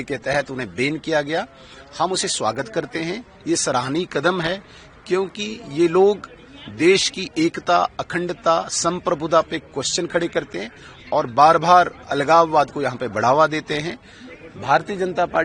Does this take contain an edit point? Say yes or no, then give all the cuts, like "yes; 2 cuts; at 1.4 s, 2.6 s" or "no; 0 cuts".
no; 0 cuts